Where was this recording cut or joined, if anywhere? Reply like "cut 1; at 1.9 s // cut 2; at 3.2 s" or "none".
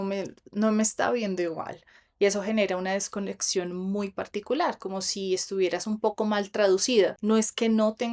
none